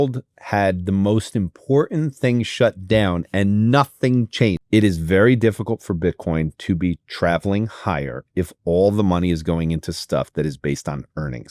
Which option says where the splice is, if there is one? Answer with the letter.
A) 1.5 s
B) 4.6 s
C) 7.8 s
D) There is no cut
B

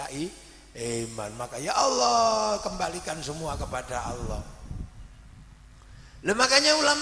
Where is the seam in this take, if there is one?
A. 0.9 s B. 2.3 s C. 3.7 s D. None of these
D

